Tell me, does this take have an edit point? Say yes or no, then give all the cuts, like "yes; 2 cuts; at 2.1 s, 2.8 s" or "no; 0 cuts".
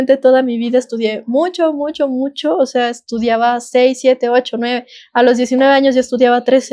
no; 0 cuts